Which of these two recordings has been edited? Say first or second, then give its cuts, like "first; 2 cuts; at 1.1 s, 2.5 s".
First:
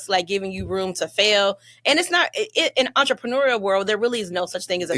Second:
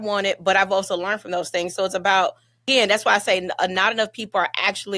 second; 1 cut; at 2.6 s